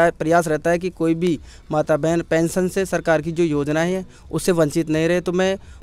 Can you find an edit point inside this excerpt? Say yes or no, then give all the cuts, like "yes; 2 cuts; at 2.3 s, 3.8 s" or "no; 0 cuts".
no; 0 cuts